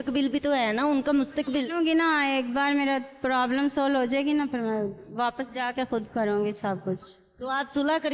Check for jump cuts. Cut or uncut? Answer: uncut